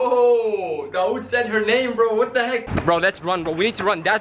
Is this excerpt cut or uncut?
cut